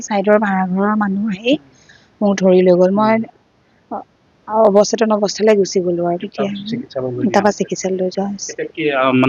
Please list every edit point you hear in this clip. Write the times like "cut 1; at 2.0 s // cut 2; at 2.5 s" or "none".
none